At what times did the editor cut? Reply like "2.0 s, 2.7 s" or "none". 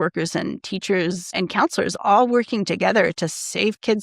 1.3 s